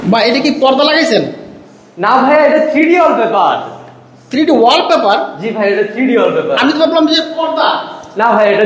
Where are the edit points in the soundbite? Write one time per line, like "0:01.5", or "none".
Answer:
none